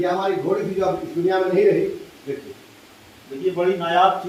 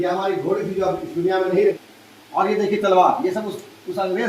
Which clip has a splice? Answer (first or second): second